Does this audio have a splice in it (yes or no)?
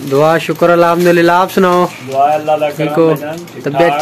no